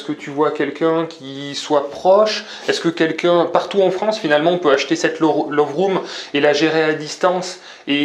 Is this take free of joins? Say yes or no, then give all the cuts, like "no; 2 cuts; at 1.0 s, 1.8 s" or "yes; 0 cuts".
yes; 0 cuts